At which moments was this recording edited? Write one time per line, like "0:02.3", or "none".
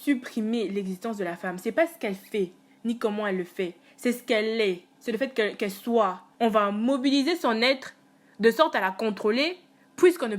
0:06.2